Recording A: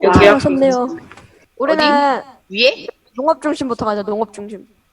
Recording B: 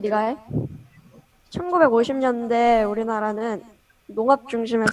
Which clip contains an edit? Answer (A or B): A